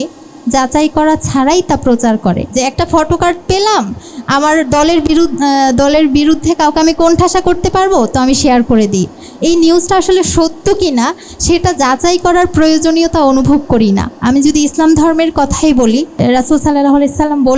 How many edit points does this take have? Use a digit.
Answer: 3